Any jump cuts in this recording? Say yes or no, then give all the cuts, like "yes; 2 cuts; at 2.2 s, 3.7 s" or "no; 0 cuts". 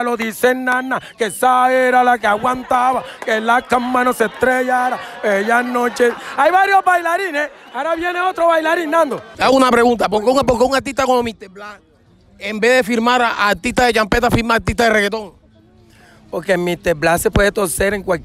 yes; 1 cut; at 9.3 s